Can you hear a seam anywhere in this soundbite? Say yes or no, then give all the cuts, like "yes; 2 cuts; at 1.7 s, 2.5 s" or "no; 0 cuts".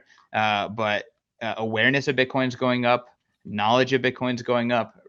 no; 0 cuts